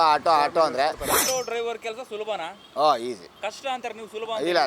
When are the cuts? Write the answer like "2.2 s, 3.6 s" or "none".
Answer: 1.2 s, 2.6 s, 3.3 s